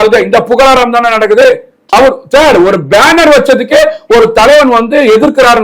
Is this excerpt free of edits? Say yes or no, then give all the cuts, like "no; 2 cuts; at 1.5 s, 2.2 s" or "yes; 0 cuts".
no; 1 cut; at 1.9 s